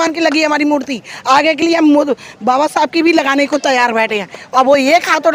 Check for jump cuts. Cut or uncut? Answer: uncut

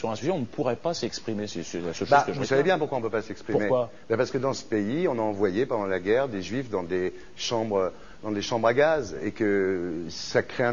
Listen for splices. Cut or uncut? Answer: cut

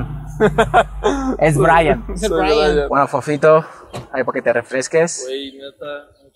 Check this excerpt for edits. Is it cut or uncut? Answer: cut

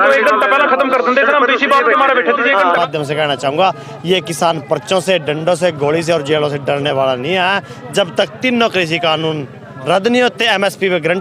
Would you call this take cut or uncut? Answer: cut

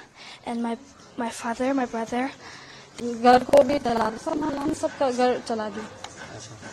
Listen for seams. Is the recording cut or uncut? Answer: cut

